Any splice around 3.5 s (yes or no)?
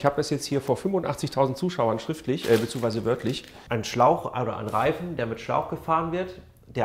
yes